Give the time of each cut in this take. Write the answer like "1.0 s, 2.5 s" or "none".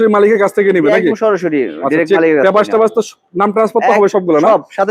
none